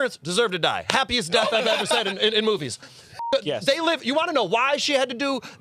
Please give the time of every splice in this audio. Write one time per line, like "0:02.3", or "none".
none